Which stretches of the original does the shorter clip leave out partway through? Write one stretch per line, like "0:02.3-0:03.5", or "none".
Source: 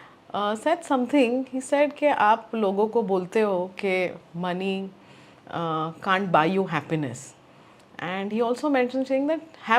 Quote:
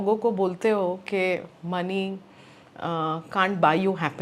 none